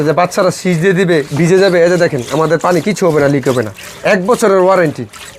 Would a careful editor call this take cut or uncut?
uncut